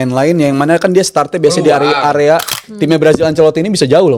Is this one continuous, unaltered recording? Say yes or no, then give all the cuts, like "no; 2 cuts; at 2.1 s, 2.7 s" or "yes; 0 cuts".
no; 1 cut; at 2.6 s